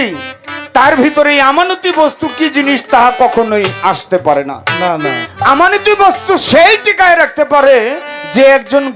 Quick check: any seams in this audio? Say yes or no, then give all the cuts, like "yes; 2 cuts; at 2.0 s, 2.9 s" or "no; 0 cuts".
no; 0 cuts